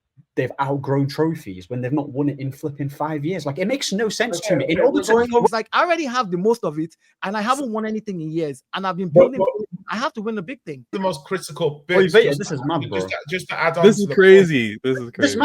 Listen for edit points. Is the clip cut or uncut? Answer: cut